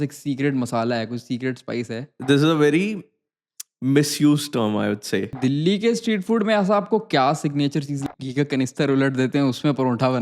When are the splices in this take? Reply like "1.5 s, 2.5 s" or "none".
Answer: 2.1 s, 5.4 s, 8.1 s

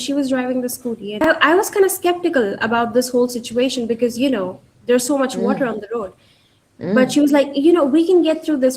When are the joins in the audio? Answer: 1.2 s

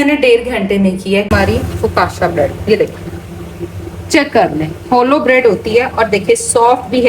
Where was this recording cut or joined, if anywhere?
1.3 s

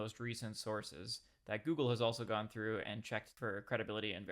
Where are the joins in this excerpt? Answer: 3.3 s

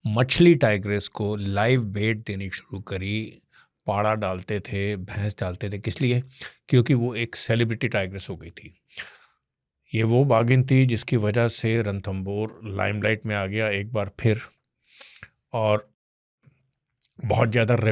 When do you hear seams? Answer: none

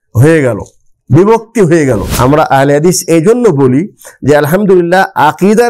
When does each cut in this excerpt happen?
2.1 s

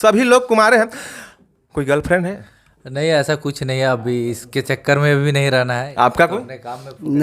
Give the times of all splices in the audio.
5.9 s

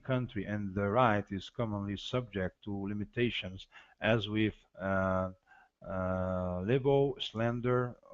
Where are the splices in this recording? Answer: 1.1 s

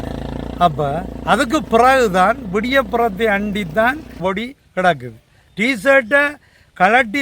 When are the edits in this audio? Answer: 4.2 s

